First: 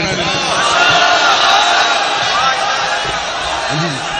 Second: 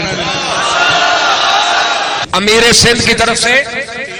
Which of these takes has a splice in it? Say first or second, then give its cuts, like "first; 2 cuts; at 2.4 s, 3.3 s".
second; 1 cut; at 2.2 s